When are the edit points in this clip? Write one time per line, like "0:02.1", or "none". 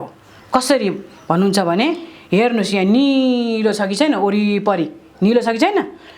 none

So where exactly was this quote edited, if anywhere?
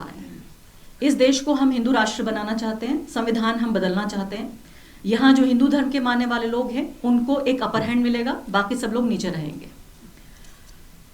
none

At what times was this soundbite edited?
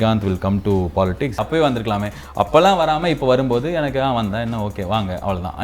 0:01.4

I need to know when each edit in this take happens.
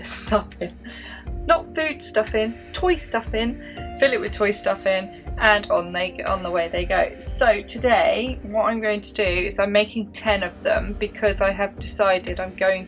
none

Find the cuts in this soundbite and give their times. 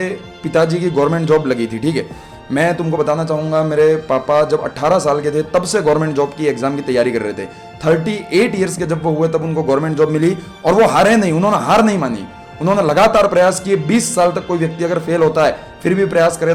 none

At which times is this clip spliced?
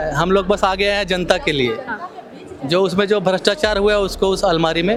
none

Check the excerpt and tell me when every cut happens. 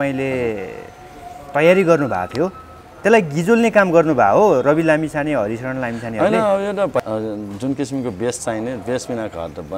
0:07.0

